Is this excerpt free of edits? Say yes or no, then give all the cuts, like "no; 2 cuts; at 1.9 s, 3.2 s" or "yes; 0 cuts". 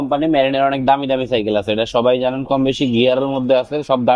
yes; 0 cuts